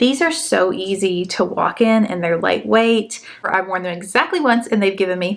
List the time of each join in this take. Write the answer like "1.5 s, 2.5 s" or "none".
3.4 s